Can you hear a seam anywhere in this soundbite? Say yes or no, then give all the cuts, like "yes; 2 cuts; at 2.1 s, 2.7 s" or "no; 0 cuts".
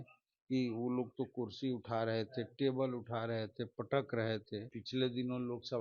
yes; 1 cut; at 4.8 s